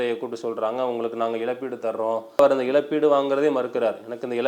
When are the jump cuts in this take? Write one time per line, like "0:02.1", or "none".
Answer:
0:02.4